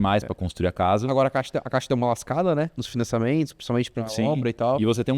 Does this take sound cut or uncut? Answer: uncut